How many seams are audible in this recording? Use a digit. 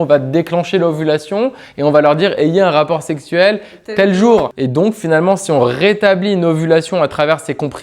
1